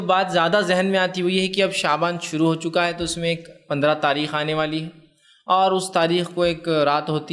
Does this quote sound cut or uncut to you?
cut